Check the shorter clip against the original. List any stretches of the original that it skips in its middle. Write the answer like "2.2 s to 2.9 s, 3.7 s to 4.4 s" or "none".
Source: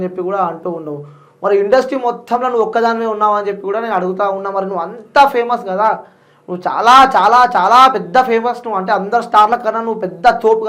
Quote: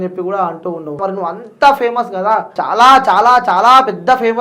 1.0 s to 4.5 s, 6.1 s to 6.6 s

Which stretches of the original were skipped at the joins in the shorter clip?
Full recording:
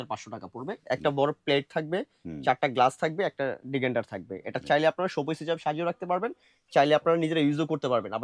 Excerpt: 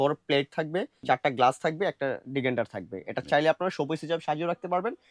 2.1 s to 2.3 s

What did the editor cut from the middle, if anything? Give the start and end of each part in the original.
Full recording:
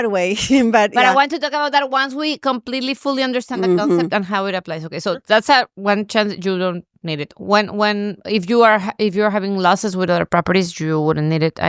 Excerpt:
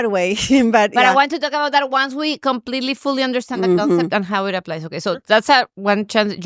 none

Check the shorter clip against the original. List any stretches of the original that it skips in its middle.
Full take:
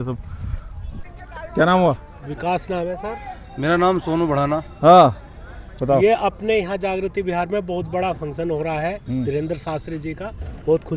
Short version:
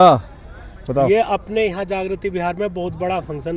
none

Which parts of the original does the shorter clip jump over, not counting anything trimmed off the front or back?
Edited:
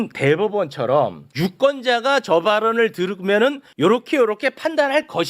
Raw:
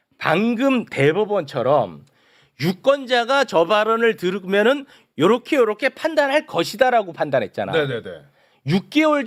2.0 s to 2.5 s, 4.9 s to 5.0 s

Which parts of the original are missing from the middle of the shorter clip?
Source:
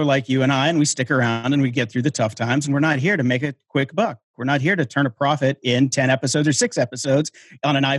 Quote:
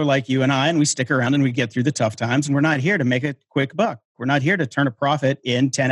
1.2 s to 1.4 s

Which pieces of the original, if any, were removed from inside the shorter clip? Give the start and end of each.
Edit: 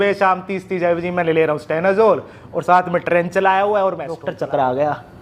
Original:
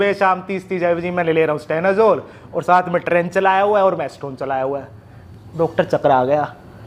4.2 s to 5.7 s

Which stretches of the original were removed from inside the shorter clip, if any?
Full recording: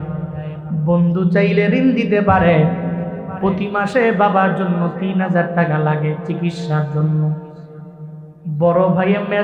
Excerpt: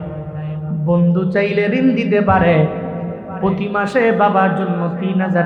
none

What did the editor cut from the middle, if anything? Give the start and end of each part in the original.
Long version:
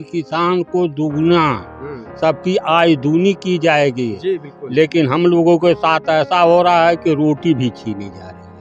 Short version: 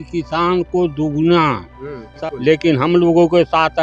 2.1 s to 4.4 s

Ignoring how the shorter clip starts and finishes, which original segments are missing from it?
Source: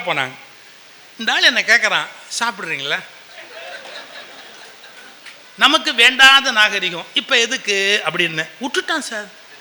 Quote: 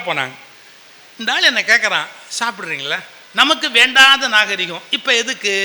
3.2 s to 5.4 s

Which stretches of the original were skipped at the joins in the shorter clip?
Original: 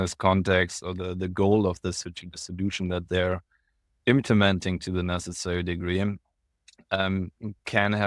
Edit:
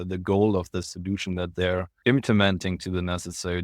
2.0 s to 2.5 s, 3.5 s to 3.9 s

